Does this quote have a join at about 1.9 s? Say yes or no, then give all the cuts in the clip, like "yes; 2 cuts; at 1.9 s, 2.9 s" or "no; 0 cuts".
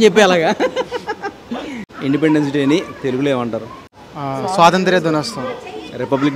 yes; 1 cut; at 1.9 s